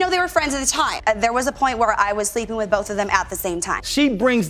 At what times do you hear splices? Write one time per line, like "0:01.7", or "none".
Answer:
0:00.9
0:03.7